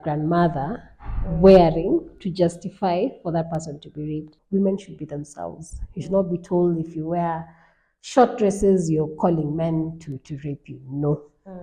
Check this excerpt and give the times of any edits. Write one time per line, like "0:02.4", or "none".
0:04.3